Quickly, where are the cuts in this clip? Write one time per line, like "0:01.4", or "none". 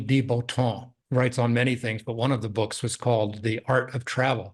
0:00.9

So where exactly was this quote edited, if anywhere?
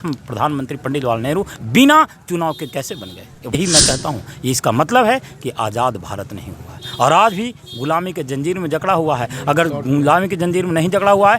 0:03.6

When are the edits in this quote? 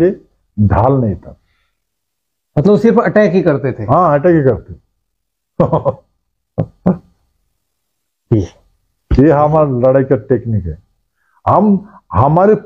none

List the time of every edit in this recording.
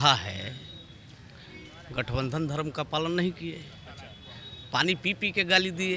none

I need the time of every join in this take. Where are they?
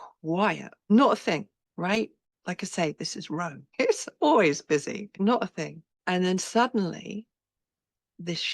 0:00.9
0:01.6
0:02.3
0:03.6
0:05.1
0:05.9

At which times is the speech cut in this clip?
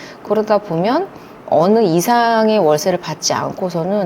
0:01.3

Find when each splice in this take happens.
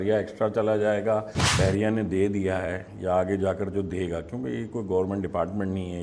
0:01.4

